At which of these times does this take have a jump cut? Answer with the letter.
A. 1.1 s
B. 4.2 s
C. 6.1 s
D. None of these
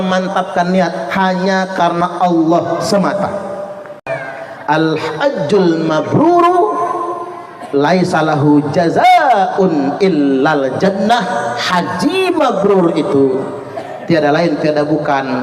B